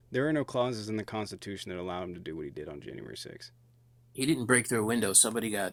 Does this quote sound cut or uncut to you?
uncut